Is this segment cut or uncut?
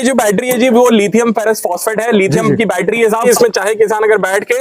cut